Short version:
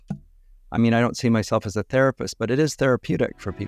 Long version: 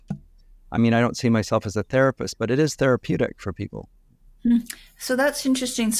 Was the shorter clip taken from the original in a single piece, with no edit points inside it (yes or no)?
yes